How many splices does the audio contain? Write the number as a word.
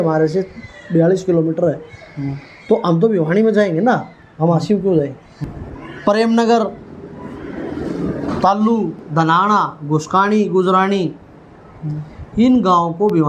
one